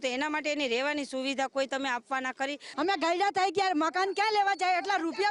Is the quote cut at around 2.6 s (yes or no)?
yes